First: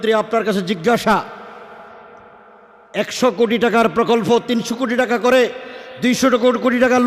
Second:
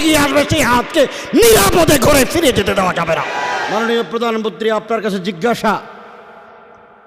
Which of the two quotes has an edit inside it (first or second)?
second